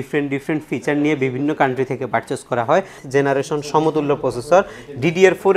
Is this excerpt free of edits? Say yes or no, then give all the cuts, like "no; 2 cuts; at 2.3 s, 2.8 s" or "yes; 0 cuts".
no; 1 cut; at 3.0 s